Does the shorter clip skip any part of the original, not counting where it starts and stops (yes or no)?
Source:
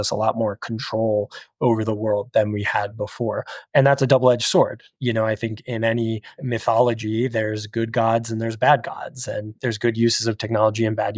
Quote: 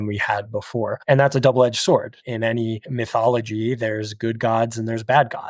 yes